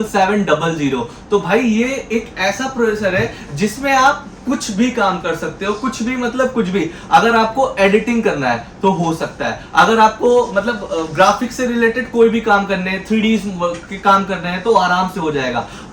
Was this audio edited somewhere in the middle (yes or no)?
no